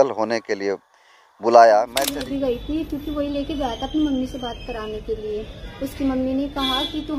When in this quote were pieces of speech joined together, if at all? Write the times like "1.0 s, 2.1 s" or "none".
2.1 s